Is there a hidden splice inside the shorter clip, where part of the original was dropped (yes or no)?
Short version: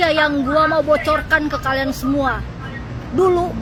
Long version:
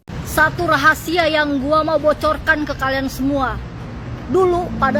no